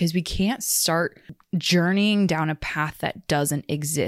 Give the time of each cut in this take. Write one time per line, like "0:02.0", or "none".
0:01.3